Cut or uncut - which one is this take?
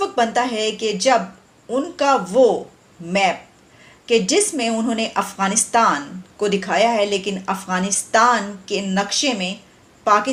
uncut